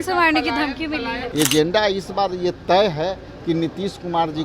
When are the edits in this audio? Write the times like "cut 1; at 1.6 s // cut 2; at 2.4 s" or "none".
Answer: cut 1; at 1.2 s